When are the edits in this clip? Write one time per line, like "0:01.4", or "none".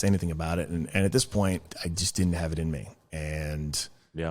0:01.7